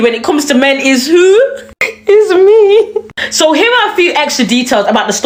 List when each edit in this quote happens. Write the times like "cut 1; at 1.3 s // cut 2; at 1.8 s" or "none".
none